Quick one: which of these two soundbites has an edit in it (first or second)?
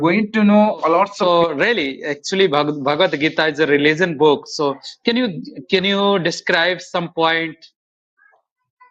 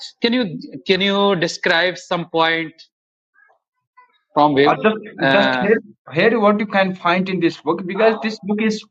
first